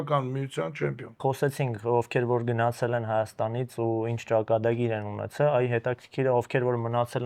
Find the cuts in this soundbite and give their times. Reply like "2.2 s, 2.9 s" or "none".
1.1 s